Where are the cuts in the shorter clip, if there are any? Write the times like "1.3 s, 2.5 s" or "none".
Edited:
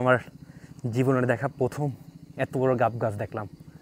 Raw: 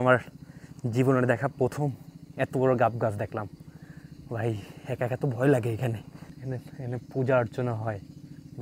none